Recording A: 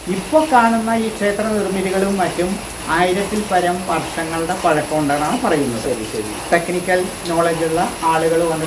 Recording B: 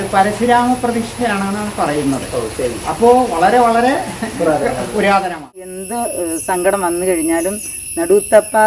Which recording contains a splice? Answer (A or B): B